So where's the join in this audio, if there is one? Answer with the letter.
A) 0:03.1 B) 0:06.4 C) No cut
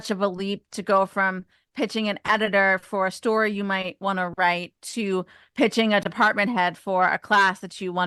C